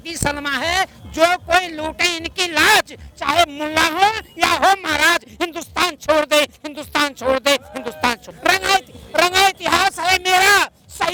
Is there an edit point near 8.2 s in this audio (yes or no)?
no